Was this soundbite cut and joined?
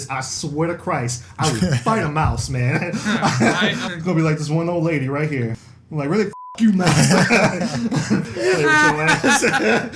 yes; 3 cuts; at 3.8 s, 5.6 s, 8.3 s

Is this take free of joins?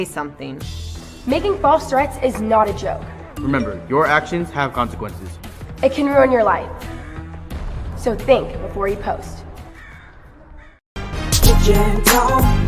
no; 1 cut; at 11.0 s

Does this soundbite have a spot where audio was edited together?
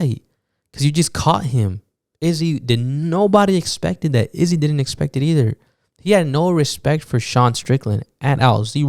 no; 0 cuts

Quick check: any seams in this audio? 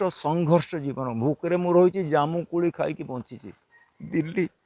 no; 0 cuts

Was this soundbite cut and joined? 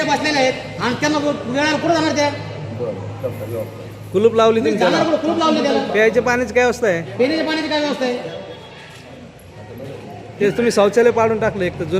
yes; 1 cut; at 10.3 s

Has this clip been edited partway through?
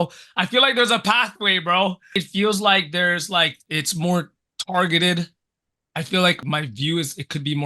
yes; 3 cuts; at 2.1 s, 3.6 s, 6.4 s

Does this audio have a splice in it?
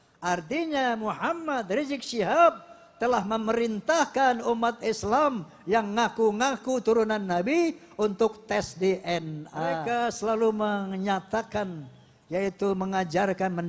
yes; 1 cut; at 9.5 s

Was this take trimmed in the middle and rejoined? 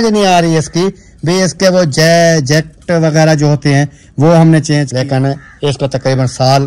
yes; 1 cut; at 4.9 s

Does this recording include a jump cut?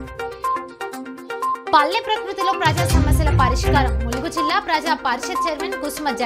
no; 0 cuts

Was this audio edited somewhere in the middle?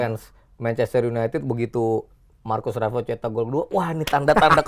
no; 0 cuts

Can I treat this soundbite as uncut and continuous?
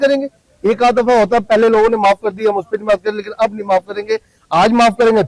yes; 0 cuts

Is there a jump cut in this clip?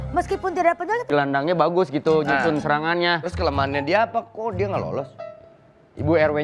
yes; 1 cut; at 1.1 s

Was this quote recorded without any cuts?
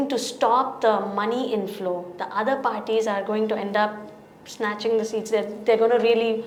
yes; 0 cuts

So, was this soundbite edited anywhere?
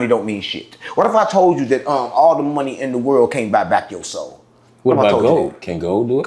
no; 0 cuts

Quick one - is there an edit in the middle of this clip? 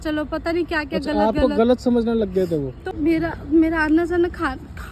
yes; 1 cut; at 2.8 s

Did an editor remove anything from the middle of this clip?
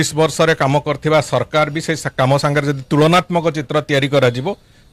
no; 0 cuts

